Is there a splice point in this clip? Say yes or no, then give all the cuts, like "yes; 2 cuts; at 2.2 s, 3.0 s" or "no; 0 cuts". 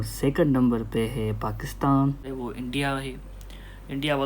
yes; 1 cut; at 2.2 s